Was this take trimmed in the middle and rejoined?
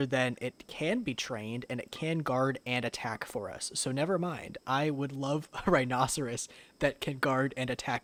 no; 0 cuts

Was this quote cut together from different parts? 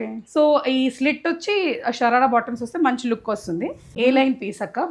yes; 1 cut; at 3.8 s

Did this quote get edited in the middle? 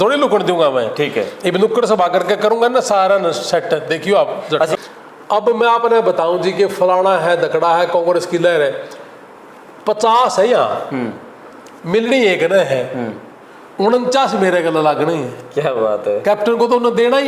yes; 1 cut; at 4.8 s

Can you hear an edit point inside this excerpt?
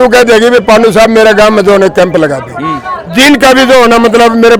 no; 0 cuts

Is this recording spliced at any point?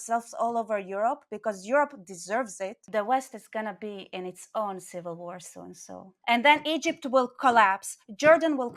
yes; 2 cuts; at 2.8 s, 6.1 s

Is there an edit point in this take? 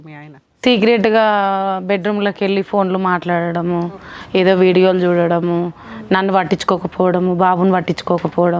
no; 0 cuts

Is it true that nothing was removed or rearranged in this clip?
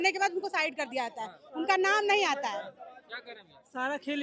yes; 0 cuts

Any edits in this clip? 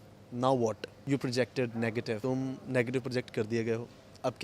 yes; 2 cuts; at 0.9 s, 2.2 s

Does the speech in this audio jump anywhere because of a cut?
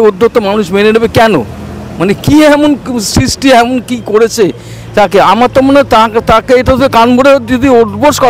no; 0 cuts

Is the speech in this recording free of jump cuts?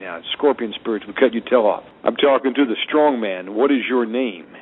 no; 1 cut; at 1.9 s

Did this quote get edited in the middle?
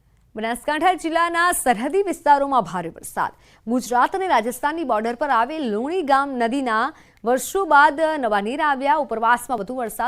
yes; 1 cut; at 1.3 s

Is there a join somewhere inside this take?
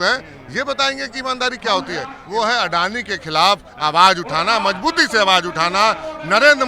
yes; 1 cut; at 2.2 s

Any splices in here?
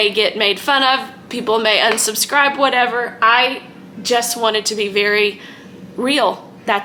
no; 0 cuts

